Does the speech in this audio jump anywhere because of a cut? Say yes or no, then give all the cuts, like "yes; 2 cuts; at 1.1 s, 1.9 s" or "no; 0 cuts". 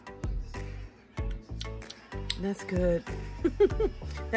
yes; 1 cut; at 2.3 s